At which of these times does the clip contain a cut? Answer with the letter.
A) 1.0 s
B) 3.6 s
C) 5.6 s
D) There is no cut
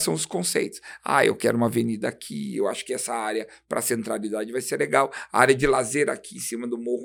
D